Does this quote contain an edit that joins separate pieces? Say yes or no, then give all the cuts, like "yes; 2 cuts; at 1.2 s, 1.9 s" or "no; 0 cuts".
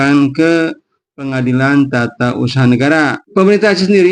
yes; 1 cut; at 3.2 s